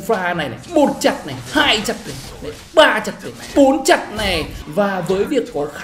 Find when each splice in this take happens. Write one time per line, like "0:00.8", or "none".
0:04.5